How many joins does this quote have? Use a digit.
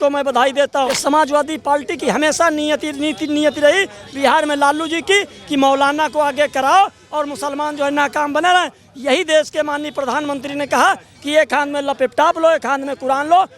1